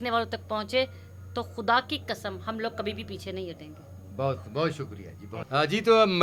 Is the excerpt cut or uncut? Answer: uncut